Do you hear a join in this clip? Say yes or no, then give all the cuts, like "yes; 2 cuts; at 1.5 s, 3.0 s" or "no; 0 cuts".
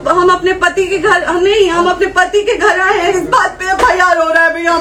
no; 0 cuts